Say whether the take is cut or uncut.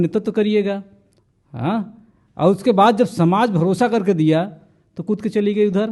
uncut